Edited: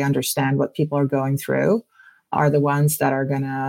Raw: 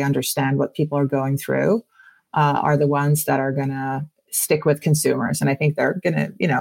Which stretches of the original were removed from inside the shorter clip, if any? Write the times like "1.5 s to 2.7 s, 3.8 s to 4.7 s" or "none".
2.3 s to 2.6 s

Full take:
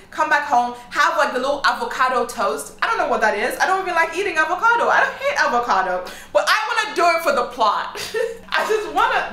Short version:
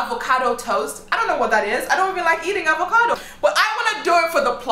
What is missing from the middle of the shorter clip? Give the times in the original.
4.8 s to 6.1 s

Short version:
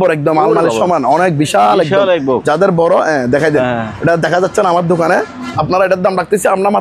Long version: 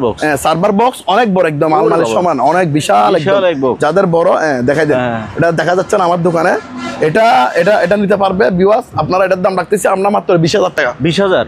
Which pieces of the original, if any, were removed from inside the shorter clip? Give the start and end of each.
6.9 s to 8.9 s

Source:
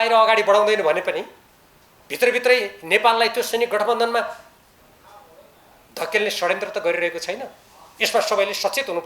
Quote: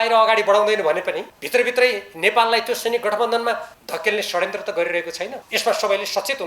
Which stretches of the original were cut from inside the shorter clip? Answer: 1.3 s to 2.0 s, 4.4 s to 5.8 s, 7.5 s to 7.9 s

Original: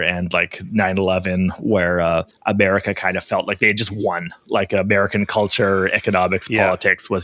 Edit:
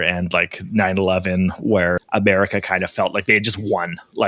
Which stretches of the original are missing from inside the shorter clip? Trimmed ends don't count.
2.0 s to 2.3 s

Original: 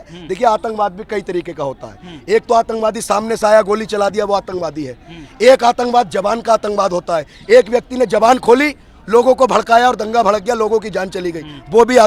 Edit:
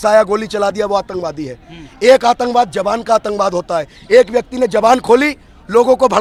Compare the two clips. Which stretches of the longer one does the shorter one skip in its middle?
none

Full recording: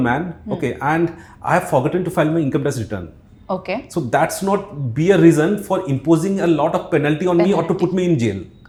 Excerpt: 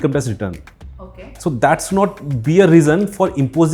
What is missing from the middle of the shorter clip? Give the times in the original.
none

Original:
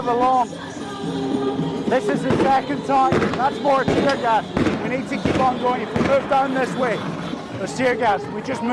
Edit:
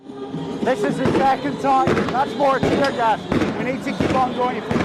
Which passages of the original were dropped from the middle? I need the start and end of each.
none

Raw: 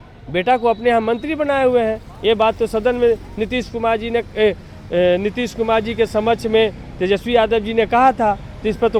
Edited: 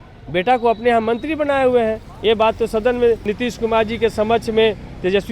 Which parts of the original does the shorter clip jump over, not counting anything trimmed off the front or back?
3.3 s to 5.3 s

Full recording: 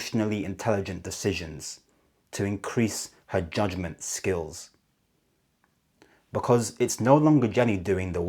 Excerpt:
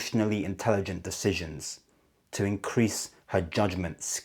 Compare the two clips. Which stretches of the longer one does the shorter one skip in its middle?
none

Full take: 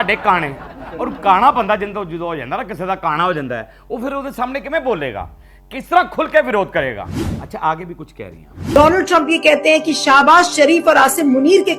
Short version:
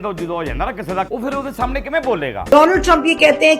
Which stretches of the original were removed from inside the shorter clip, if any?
3.0 s to 3.9 s, 5.3 s to 8.7 s

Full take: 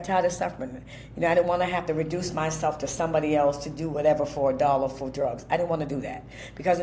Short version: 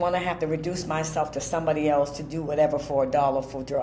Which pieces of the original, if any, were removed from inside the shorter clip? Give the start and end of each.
none

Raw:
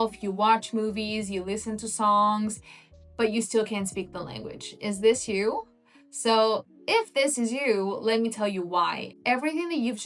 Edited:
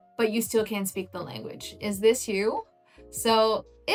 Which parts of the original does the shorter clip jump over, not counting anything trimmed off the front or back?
none

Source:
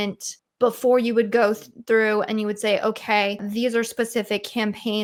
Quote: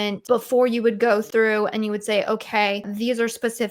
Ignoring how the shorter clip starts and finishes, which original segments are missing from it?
1.6 s to 1.8 s

